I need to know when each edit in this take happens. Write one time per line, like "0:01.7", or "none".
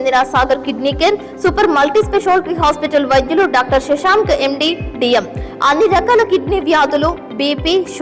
none